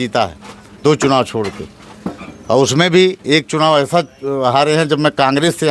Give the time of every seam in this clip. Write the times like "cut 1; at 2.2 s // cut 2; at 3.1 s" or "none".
none